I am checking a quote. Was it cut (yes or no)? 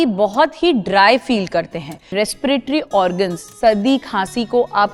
yes